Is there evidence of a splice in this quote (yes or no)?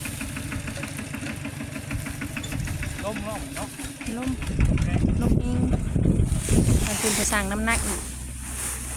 yes